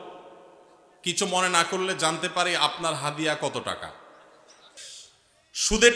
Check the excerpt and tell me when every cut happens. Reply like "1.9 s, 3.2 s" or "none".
4.8 s